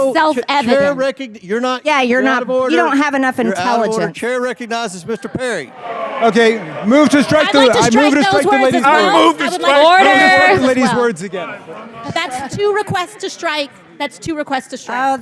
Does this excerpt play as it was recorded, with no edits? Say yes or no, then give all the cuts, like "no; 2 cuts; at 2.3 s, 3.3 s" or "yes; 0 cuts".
yes; 0 cuts